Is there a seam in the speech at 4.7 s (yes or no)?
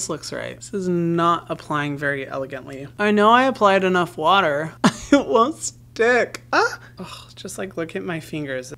yes